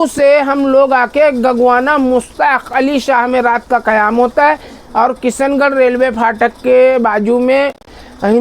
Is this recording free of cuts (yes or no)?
yes